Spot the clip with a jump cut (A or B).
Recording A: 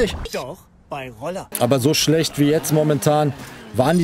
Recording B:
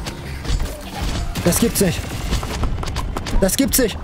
A